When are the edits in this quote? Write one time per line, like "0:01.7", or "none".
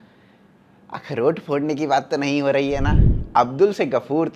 0:03.0